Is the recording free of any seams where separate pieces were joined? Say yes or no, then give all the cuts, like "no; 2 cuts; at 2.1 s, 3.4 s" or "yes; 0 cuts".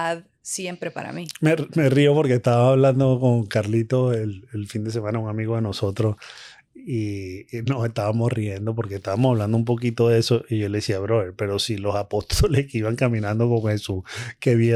yes; 0 cuts